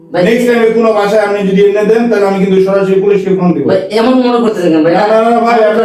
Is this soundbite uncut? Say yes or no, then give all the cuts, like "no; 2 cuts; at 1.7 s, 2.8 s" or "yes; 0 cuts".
yes; 0 cuts